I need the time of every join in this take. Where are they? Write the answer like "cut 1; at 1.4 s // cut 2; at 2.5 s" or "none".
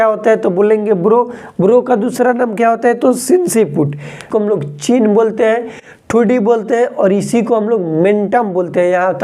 cut 1; at 4.3 s